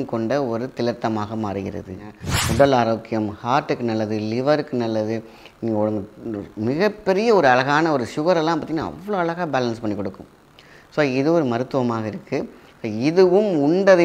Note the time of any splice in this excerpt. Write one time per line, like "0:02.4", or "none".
0:02.1